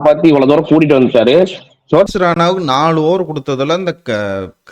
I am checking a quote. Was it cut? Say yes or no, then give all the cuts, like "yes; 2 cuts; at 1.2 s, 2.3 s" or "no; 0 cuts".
yes; 1 cut; at 2.1 s